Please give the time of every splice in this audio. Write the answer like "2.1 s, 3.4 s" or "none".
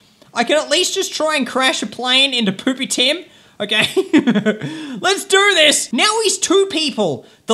5.8 s